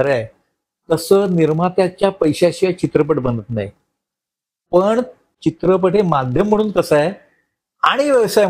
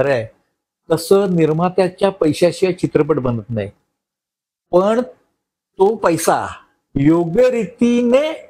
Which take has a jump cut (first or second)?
first